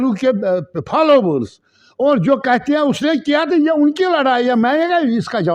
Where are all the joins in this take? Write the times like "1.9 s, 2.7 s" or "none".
none